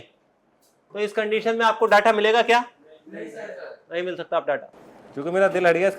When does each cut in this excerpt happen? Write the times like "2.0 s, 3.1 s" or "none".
4.7 s